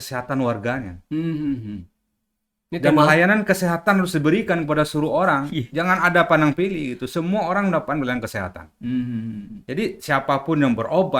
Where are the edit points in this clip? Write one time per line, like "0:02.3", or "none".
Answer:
none